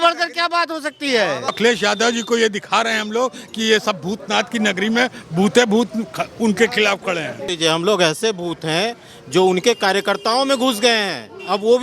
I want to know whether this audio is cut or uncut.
cut